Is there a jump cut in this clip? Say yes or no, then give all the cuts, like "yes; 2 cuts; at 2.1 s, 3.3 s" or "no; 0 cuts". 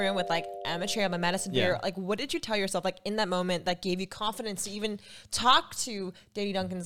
no; 0 cuts